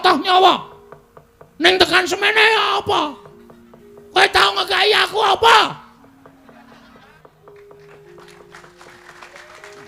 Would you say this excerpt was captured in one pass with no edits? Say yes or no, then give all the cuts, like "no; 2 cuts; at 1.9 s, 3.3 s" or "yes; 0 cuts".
no; 1 cut; at 7.1 s